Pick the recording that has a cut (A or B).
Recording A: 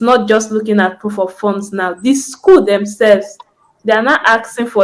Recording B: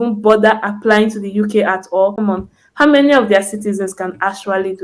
B